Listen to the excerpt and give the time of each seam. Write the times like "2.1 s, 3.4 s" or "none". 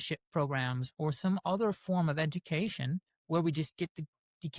3.1 s